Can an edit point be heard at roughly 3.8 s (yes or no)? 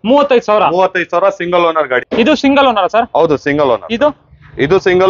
no